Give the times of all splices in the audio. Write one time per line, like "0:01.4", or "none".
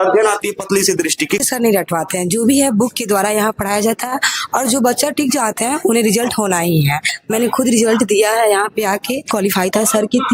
0:01.4
0:07.2
0:09.3